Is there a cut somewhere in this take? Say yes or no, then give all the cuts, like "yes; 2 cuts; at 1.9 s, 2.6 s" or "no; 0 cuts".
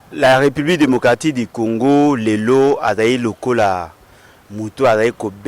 no; 0 cuts